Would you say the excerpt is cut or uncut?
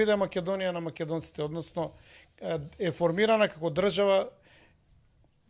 uncut